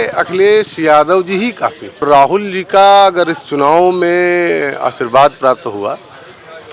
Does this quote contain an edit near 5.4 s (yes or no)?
no